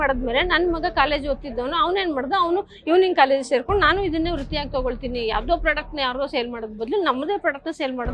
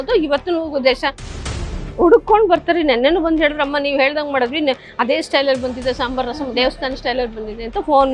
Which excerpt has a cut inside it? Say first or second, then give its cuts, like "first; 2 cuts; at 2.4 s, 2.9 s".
second; 1 cut; at 1.3 s